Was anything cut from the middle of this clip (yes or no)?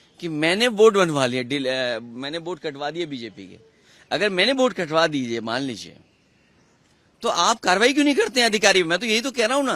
no